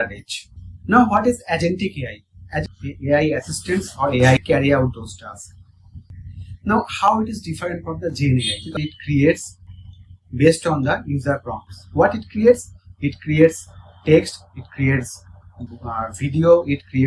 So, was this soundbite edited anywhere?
yes; 3 cuts; at 2.6 s, 4.4 s, 8.8 s

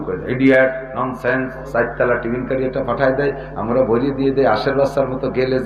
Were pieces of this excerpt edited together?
yes; 1 cut; at 1.6 s

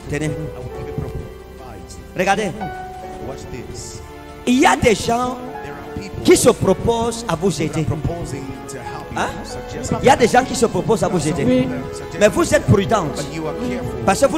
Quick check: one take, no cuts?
yes; 0 cuts

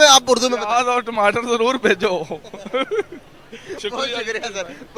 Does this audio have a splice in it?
no; 0 cuts

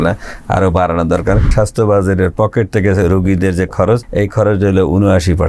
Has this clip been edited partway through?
yes; 2 cuts; at 1.5 s, 4.1 s

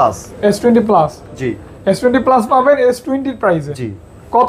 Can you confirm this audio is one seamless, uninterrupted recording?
yes; 0 cuts

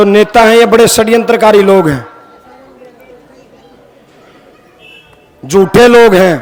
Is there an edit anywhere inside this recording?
no; 0 cuts

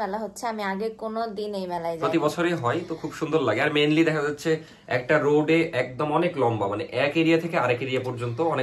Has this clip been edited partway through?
no; 0 cuts

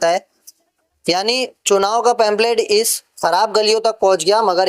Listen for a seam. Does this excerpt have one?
no; 0 cuts

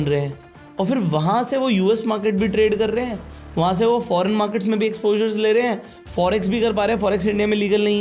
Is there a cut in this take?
no; 0 cuts

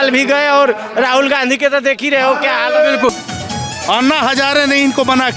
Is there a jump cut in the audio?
yes; 1 cut; at 3.1 s

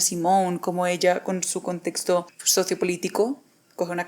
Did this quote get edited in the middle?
yes; 1 cut; at 2.4 s

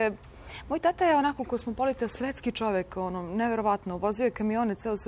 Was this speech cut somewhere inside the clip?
no; 0 cuts

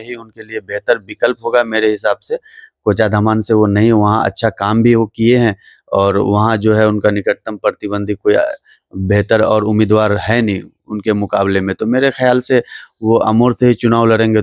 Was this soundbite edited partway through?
no; 0 cuts

